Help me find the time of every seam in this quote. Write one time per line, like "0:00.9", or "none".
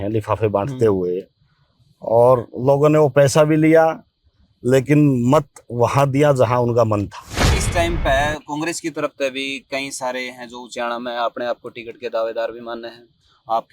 0:07.6